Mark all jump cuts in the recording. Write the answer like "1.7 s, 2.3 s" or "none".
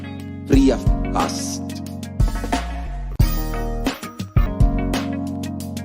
4.5 s